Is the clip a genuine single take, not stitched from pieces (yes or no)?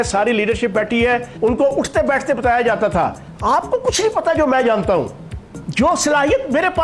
no